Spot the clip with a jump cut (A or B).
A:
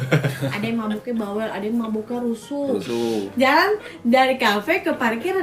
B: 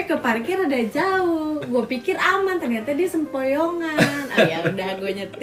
A